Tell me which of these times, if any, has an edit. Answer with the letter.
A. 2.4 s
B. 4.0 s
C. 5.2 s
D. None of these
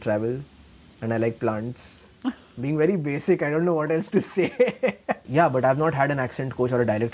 C